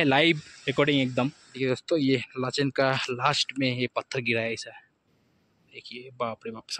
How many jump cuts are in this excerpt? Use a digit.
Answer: 1